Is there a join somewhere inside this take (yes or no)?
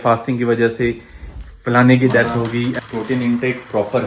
yes